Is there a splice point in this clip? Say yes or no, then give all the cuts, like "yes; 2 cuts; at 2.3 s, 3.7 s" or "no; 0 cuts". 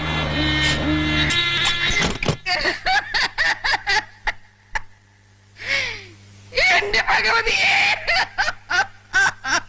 yes; 1 cut; at 1.3 s